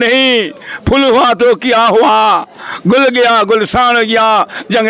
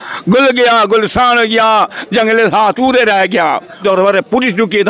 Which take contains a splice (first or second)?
second